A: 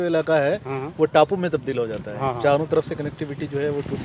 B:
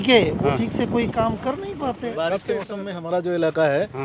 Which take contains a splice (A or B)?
B